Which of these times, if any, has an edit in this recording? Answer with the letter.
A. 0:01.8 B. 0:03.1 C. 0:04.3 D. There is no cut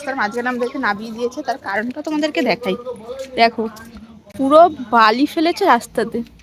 D